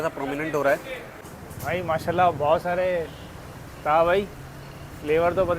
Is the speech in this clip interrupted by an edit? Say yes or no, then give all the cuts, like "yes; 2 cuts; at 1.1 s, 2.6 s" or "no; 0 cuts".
yes; 1 cut; at 1.0 s